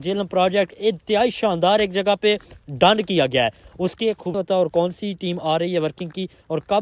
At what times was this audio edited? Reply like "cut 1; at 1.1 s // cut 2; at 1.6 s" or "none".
cut 1; at 4.3 s

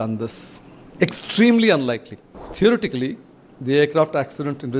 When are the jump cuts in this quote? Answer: cut 1; at 2.5 s

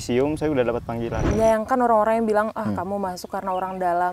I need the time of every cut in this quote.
cut 1; at 1.3 s

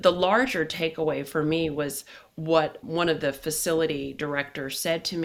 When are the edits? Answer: none

